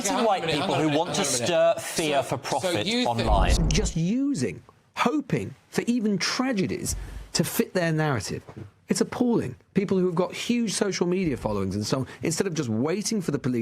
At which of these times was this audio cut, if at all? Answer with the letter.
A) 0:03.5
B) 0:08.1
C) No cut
A